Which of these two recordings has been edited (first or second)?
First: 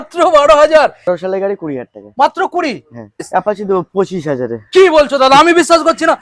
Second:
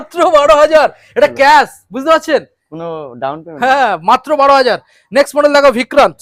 first